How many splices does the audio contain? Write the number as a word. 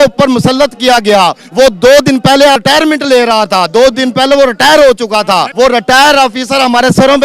two